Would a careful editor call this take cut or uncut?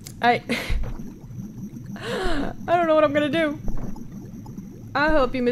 uncut